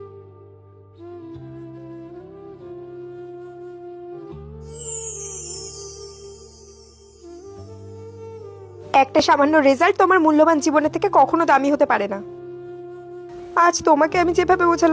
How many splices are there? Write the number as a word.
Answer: one